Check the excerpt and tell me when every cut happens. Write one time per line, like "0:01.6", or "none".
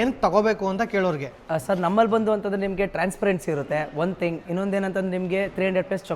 none